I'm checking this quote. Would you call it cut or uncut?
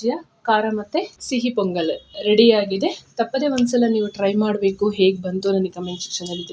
cut